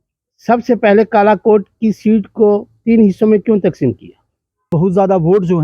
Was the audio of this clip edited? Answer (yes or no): yes